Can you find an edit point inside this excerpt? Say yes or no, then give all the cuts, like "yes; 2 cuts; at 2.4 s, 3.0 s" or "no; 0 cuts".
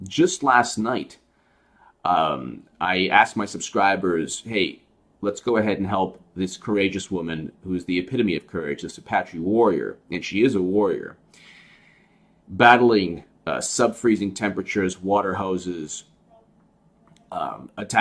yes; 1 cut; at 13.2 s